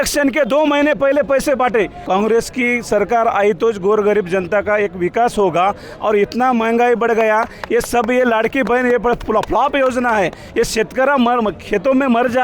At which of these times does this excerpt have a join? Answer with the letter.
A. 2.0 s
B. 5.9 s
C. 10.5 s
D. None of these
A